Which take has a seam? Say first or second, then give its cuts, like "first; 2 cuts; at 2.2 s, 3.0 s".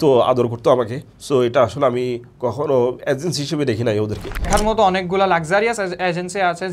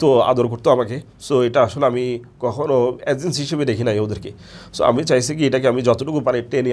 first; 1 cut; at 4.5 s